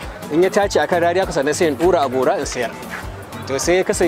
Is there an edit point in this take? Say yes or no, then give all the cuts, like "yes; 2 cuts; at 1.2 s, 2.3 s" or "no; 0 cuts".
no; 0 cuts